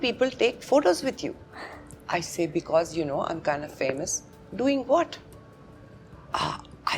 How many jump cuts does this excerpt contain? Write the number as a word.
zero